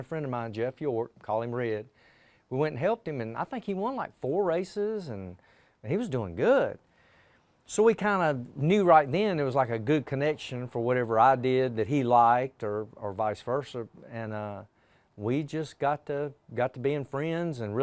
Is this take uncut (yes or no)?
yes